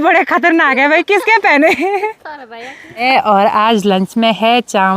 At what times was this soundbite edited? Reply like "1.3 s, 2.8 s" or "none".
3.0 s